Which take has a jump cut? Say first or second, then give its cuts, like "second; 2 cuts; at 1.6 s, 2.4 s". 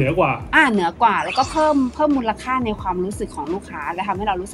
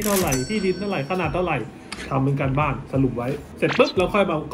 second; 1 cut; at 3.5 s